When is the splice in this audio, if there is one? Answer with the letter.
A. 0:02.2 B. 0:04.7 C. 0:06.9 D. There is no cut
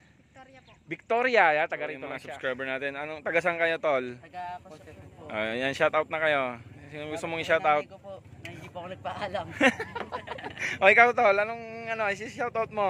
A